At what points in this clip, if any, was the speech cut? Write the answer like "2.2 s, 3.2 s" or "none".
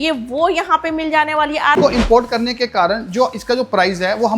1.8 s

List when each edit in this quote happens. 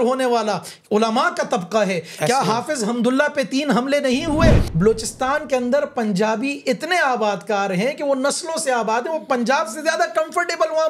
4.6 s

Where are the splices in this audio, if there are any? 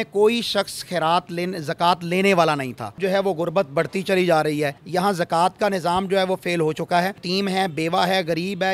3.0 s, 4.8 s, 7.2 s

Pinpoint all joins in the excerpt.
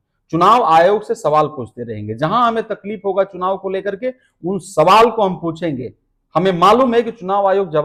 none

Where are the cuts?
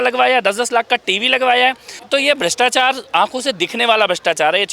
1.9 s

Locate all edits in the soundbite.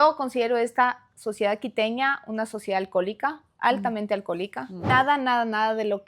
4.9 s

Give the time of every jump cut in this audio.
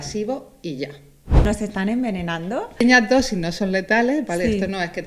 1.5 s, 2.8 s

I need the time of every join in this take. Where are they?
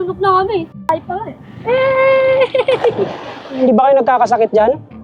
3.6 s

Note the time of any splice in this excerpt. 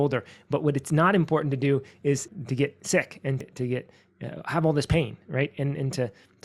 2.3 s, 3.4 s

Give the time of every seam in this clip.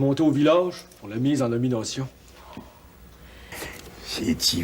3.5 s

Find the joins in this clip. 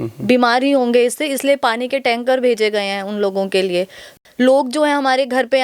4.1 s

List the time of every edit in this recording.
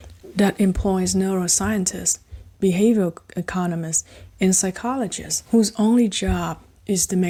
none

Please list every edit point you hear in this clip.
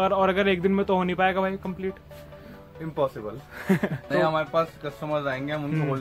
4.1 s

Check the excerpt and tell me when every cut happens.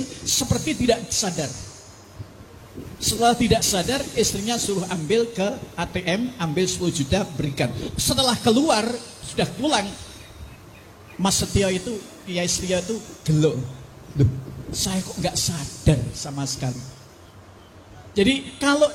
none

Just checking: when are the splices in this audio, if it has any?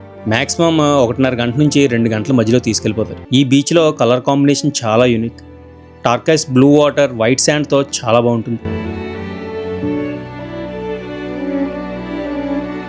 3.2 s

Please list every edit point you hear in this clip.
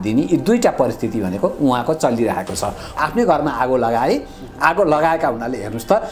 2.9 s

